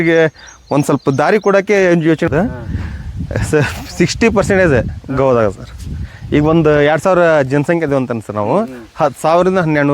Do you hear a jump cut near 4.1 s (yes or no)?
no